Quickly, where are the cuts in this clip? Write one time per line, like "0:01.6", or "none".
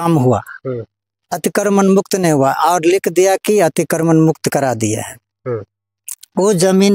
none